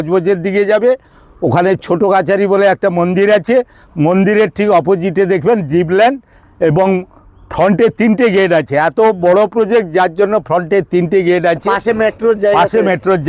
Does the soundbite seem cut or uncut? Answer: uncut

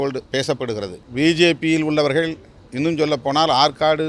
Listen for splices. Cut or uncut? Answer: cut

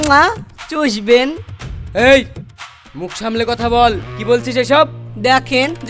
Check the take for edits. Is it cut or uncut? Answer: uncut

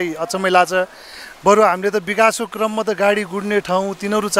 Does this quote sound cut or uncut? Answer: uncut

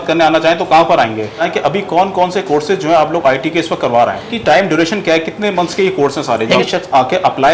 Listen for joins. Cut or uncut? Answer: cut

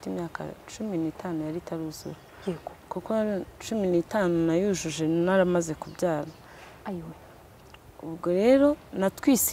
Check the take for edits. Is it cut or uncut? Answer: uncut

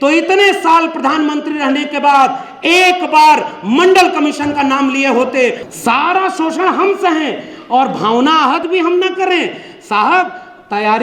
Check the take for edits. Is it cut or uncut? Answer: cut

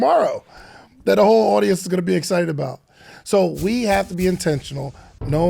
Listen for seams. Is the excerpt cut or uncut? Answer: uncut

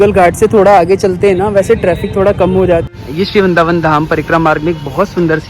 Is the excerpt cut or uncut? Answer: cut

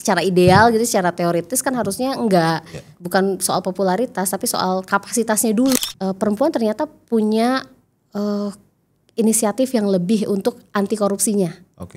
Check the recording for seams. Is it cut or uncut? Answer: cut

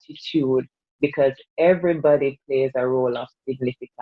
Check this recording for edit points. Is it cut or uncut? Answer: uncut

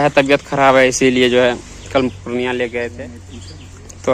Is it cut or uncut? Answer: cut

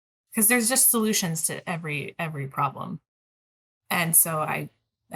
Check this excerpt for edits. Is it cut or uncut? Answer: uncut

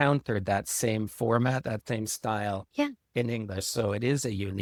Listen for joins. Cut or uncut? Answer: uncut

